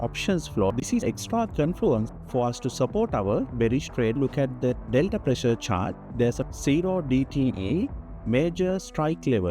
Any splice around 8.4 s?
no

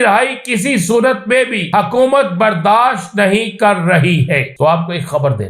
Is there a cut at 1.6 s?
yes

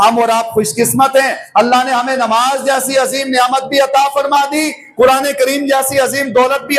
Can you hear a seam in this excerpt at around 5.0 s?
no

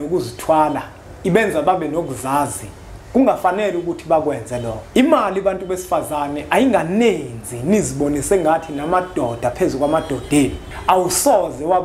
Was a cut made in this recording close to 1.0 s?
no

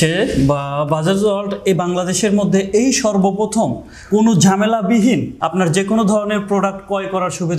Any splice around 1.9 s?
no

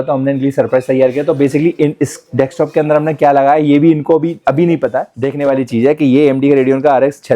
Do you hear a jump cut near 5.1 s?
yes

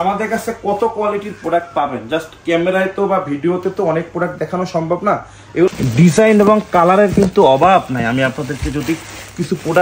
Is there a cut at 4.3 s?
no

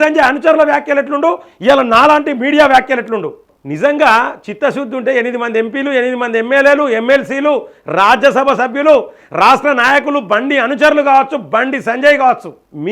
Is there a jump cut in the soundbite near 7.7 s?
no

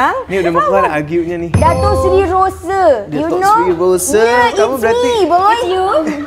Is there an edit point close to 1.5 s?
yes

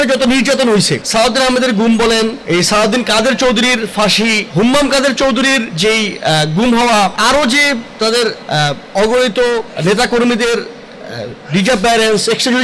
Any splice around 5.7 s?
yes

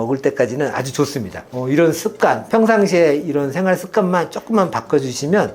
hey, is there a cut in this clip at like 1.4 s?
yes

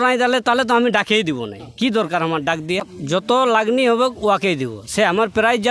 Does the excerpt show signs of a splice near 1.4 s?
no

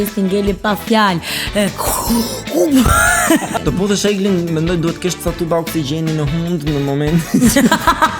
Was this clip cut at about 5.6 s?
no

